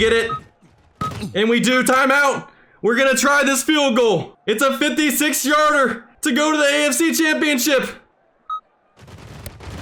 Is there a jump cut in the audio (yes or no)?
no